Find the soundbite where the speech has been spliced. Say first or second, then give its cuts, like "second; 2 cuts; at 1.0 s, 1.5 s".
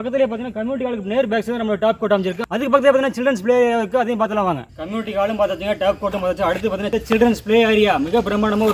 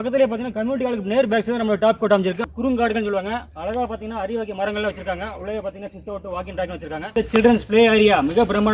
second; 2 cuts; at 2.5 s, 7.1 s